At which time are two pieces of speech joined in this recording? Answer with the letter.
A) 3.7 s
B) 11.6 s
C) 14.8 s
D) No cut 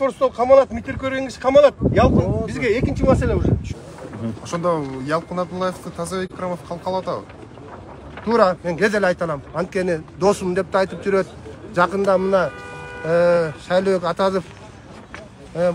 A